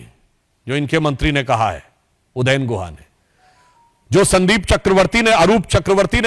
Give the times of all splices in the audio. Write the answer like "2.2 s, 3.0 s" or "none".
none